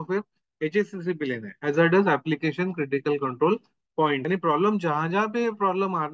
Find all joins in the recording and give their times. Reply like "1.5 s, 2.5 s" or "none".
4.2 s